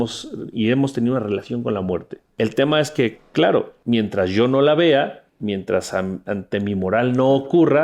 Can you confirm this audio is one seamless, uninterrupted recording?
no; 3 cuts; at 2.2 s, 3.7 s, 5.3 s

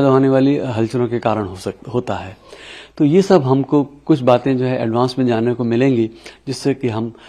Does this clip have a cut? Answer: no; 0 cuts

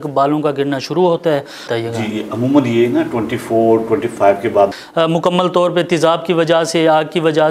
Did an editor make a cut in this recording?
yes; 2 cuts; at 1.6 s, 4.7 s

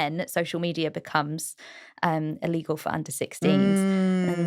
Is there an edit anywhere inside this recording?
no; 0 cuts

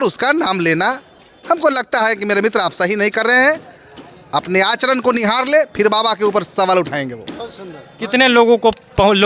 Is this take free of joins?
yes; 0 cuts

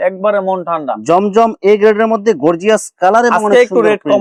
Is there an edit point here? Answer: no; 0 cuts

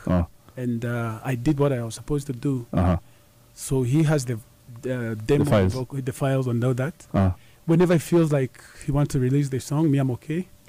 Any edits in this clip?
no; 0 cuts

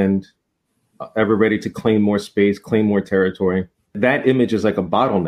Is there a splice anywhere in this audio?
yes; 1 cut; at 3.9 s

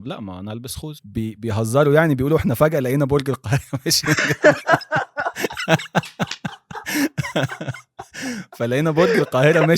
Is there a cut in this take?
yes; 1 cut; at 1.0 s

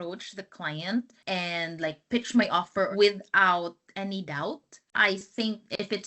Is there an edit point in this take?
yes; 2 cuts; at 2.9 s, 4.9 s

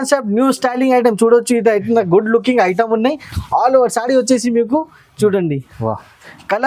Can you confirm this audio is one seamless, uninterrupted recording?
yes; 0 cuts

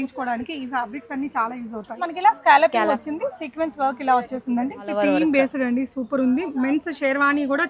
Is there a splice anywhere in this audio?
yes; 2 cuts; at 2.0 s, 4.9 s

